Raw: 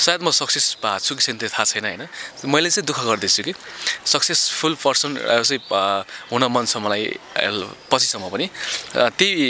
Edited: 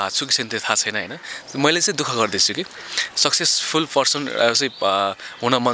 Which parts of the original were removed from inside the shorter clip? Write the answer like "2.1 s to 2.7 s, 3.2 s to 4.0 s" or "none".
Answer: none